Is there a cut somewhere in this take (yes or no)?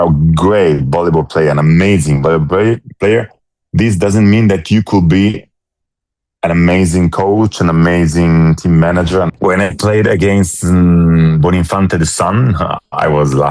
yes